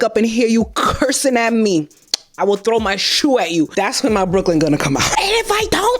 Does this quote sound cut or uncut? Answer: cut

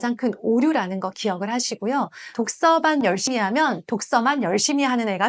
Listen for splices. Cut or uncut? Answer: cut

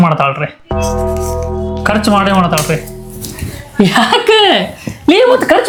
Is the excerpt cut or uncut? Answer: uncut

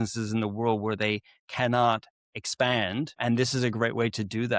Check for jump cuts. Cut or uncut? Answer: uncut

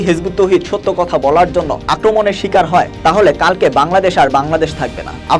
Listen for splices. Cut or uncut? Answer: uncut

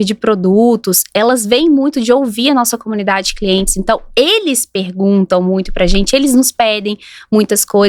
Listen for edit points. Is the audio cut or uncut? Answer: uncut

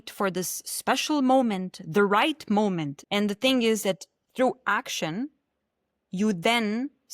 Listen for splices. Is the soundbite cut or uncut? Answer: cut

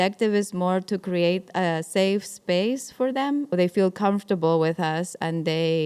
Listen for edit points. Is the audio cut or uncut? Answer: cut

